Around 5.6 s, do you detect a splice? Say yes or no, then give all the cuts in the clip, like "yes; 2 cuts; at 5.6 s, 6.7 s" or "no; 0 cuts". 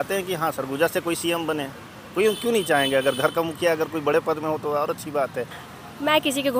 yes; 1 cut; at 5.6 s